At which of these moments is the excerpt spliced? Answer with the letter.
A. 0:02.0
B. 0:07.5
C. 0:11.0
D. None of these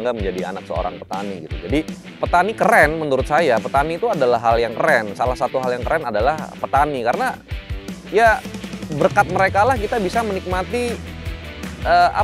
A